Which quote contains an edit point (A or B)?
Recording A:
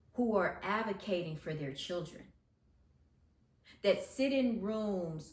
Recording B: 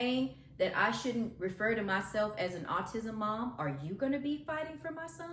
A